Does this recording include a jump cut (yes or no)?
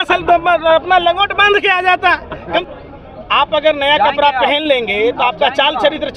yes